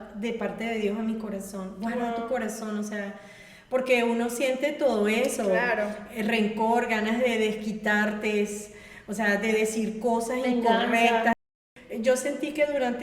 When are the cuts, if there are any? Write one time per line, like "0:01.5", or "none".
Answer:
0:11.4